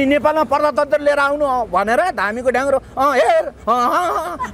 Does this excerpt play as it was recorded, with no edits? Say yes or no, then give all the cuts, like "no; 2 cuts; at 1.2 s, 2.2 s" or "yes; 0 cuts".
yes; 0 cuts